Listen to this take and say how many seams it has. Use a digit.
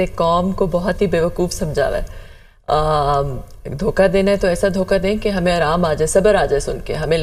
0